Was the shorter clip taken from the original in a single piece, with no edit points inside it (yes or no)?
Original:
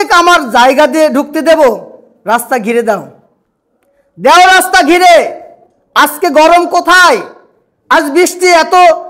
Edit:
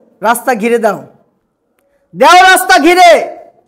yes